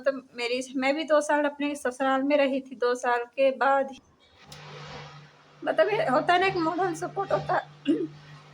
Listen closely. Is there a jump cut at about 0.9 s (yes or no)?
no